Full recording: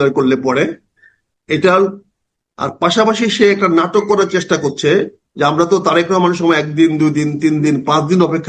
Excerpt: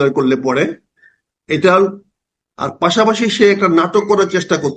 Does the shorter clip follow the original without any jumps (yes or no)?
yes